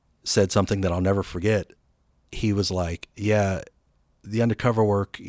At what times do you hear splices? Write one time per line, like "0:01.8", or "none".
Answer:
0:01.8